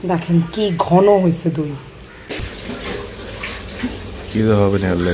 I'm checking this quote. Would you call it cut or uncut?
cut